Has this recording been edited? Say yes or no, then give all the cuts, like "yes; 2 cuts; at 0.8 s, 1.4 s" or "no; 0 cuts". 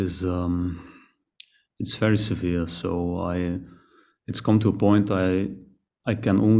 no; 0 cuts